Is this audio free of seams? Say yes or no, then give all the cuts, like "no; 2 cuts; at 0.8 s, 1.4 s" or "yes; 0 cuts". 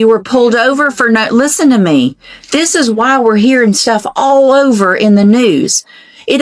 yes; 0 cuts